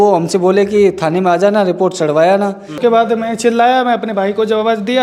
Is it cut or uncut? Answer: cut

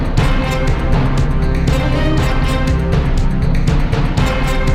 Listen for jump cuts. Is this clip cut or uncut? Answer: uncut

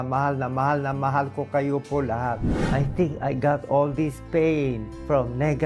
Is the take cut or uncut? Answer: cut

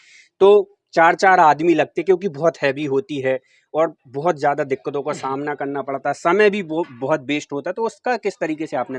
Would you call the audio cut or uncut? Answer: uncut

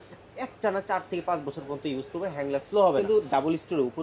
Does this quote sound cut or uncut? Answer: cut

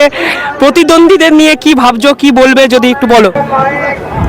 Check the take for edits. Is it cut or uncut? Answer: cut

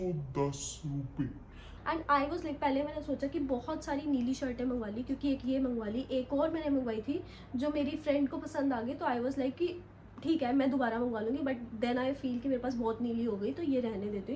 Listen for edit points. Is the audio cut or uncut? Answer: uncut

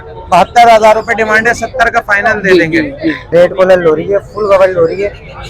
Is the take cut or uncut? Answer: cut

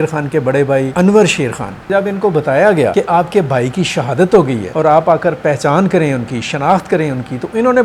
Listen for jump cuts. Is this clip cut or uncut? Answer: cut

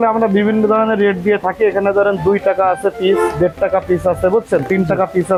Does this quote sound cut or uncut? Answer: uncut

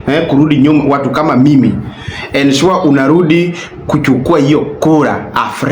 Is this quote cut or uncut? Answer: uncut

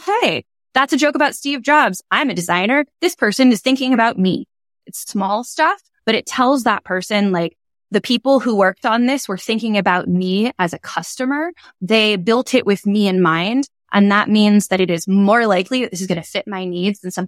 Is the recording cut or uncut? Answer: uncut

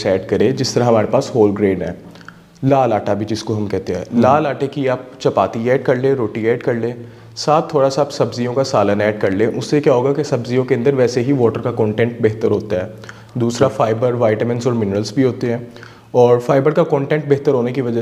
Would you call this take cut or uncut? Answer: uncut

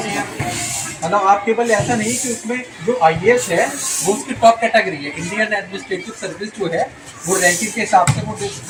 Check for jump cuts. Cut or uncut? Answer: uncut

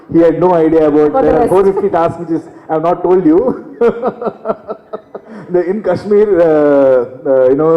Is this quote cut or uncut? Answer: cut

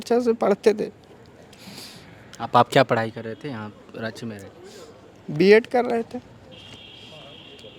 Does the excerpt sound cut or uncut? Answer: uncut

